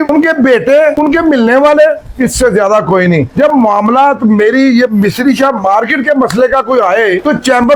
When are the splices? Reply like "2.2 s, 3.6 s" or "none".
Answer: none

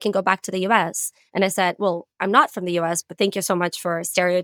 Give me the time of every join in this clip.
none

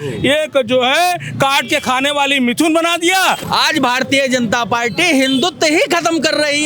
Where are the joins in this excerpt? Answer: 3.4 s

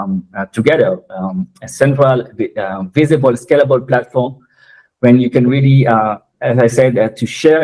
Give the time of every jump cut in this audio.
none

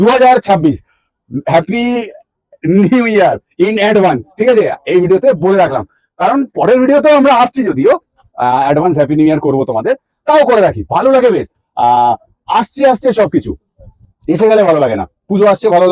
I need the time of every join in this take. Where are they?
none

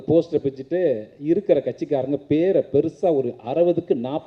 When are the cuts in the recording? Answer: none

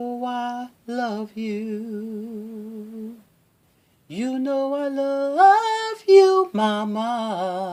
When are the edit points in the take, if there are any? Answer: none

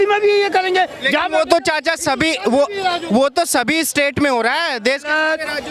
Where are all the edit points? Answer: none

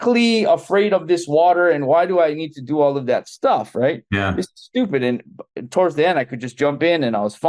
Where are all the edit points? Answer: none

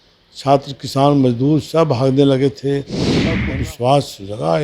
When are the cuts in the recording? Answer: 3.3 s

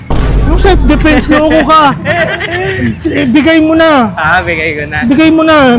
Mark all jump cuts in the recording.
none

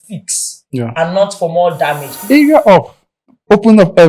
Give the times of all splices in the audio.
2.1 s

